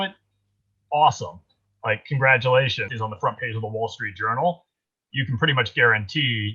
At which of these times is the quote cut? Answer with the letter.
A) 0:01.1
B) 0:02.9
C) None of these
B